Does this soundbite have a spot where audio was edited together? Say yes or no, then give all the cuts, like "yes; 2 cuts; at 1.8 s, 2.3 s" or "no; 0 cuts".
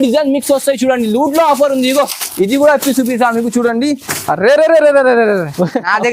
no; 0 cuts